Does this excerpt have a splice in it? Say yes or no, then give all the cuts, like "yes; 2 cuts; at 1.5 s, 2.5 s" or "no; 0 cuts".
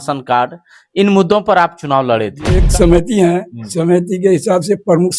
yes; 1 cut; at 2.6 s